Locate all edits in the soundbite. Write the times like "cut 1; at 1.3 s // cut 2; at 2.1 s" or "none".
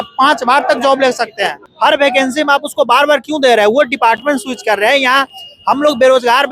cut 1; at 1.6 s